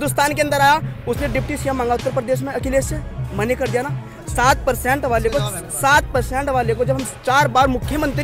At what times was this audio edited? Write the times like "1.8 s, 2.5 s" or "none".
none